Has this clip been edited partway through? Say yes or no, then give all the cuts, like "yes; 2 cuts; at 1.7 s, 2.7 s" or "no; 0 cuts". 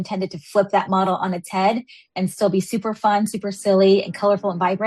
no; 0 cuts